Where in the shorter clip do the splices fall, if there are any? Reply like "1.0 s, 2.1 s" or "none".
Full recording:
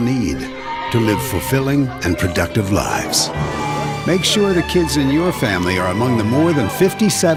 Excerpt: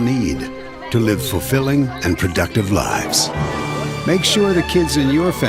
none